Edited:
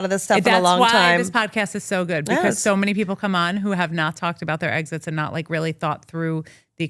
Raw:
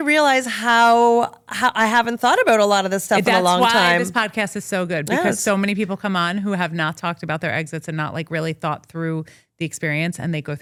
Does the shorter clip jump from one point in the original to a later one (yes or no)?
no